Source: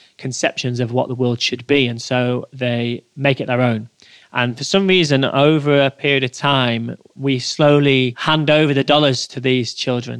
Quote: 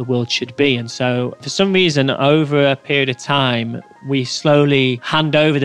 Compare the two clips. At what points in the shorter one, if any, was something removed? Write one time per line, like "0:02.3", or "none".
0:01.4